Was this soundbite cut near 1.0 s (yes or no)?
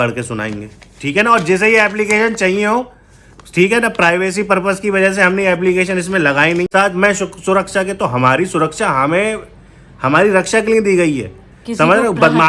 no